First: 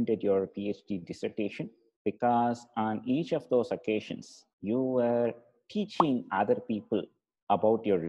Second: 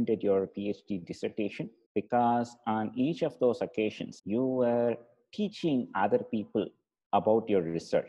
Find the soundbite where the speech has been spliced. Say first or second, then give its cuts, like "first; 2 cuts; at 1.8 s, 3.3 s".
second; 2 cuts; at 1.8 s, 4.1 s